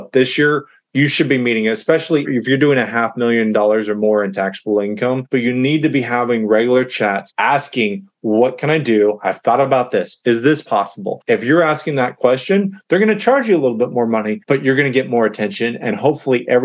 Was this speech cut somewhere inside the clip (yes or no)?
yes